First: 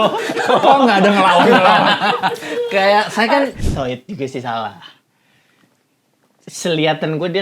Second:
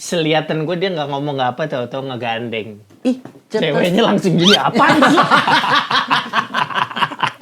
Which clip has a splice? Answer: first; 1 cut; at 3.6 s

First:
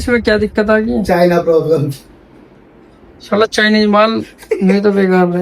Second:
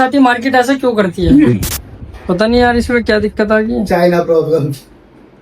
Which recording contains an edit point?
second; 1 cut; at 1.3 s

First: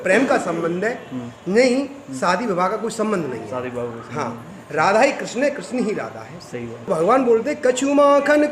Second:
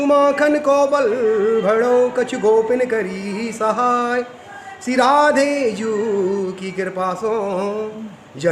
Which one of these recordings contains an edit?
first; 1 cut; at 6.9 s

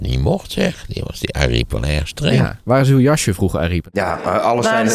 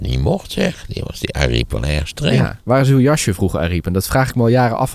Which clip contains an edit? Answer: first; 1 cut; at 3.8 s

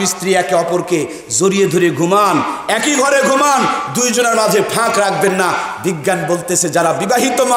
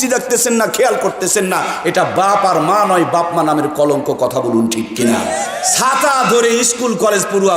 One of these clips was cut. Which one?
second; 1 cut; at 5.5 s

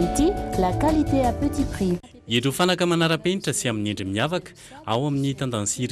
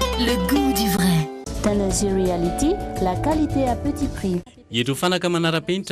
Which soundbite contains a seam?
second; 1 cut; at 1.4 s

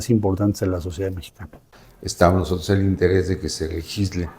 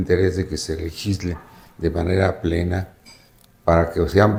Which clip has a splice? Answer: first; 1 cut; at 1.6 s

